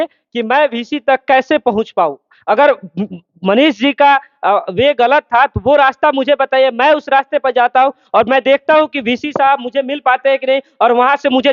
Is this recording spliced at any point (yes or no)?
no